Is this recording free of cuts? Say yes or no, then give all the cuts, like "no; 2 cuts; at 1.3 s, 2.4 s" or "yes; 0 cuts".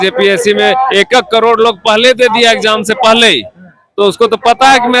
yes; 0 cuts